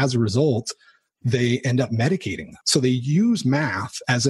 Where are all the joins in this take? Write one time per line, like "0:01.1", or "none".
0:02.6